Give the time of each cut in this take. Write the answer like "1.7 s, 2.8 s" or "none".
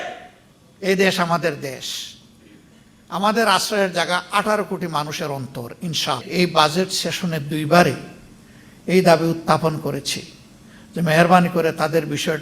6.2 s